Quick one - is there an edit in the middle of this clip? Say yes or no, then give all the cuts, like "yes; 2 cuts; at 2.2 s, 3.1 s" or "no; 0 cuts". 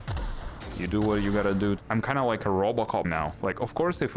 yes; 2 cuts; at 1.8 s, 3.1 s